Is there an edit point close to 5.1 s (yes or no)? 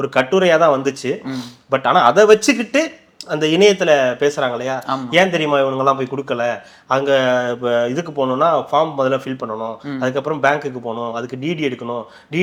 no